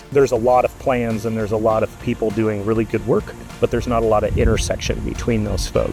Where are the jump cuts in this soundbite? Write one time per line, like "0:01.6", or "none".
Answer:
none